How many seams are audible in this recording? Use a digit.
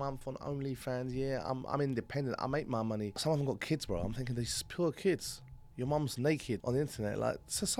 2